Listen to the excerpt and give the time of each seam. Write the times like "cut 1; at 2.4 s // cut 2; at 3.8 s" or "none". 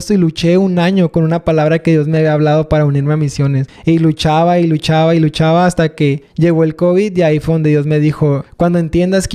cut 1; at 3.7 s // cut 2; at 6.2 s // cut 3; at 8.4 s